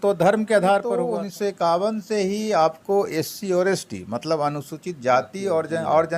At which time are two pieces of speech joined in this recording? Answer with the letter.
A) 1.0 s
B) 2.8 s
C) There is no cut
A